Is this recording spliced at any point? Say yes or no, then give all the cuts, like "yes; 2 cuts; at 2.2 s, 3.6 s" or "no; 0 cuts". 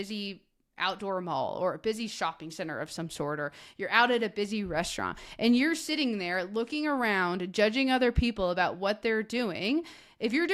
no; 0 cuts